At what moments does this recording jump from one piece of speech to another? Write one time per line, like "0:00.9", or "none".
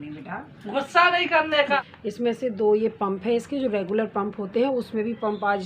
0:01.8

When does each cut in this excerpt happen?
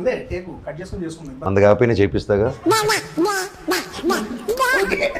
0:01.4

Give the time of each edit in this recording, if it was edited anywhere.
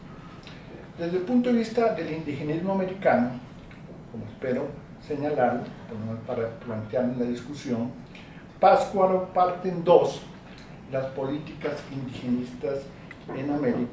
0:05.8

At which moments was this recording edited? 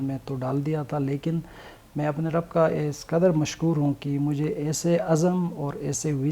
none

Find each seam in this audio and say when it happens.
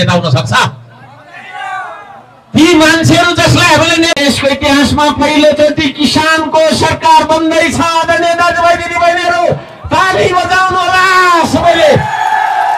0:04.2

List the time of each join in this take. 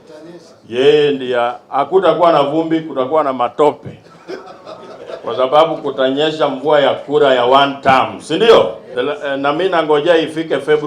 0:08.8

